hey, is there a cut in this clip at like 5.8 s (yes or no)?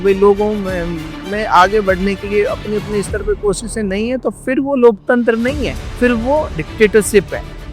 yes